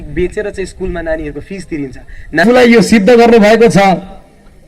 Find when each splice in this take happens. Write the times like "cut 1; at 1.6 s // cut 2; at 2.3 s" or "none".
cut 1; at 2.4 s